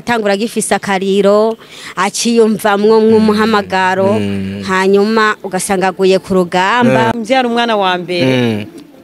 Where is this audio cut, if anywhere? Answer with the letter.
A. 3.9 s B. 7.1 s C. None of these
B